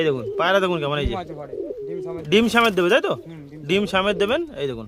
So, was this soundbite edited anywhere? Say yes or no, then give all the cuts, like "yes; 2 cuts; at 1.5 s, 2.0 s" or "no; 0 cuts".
no; 0 cuts